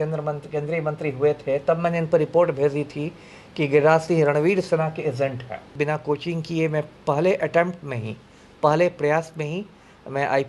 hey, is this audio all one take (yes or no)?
no